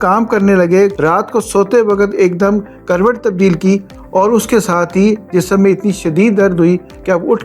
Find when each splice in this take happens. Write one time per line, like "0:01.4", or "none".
0:01.0